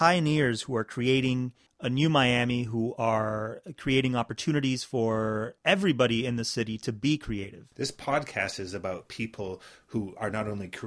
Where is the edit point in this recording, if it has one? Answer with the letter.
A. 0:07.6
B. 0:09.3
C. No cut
A